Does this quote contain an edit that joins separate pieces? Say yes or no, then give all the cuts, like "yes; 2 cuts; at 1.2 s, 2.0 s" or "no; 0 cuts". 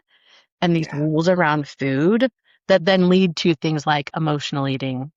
no; 0 cuts